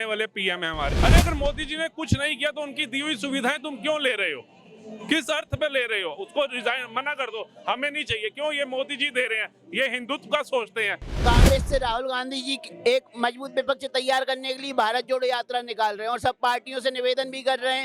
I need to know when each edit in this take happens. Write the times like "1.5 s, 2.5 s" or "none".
1.0 s, 11.2 s